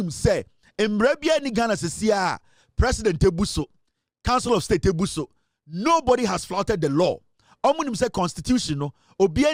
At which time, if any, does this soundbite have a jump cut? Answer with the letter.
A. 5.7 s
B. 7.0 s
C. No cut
C